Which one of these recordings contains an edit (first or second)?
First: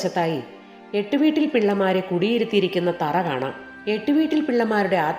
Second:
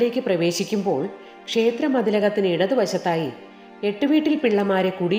first